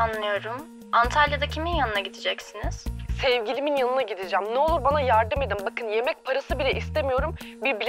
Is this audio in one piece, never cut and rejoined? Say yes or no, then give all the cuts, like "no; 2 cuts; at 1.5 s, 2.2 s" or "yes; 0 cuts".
yes; 0 cuts